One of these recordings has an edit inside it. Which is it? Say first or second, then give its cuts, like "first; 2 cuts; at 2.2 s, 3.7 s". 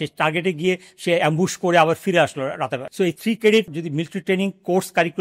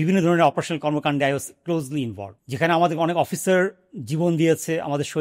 first; 2 cuts; at 3.1 s, 3.8 s